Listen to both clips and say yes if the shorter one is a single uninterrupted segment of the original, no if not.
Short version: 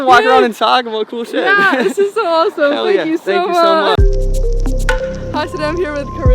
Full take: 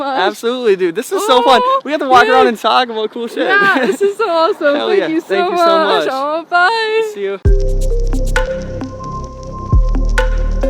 no